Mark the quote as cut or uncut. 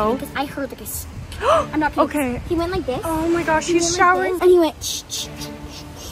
uncut